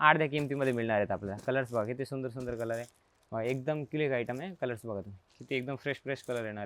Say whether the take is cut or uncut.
uncut